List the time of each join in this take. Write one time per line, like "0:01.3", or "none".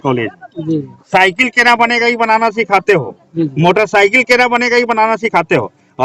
none